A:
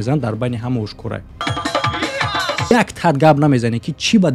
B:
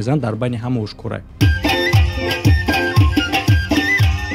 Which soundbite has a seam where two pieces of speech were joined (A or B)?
A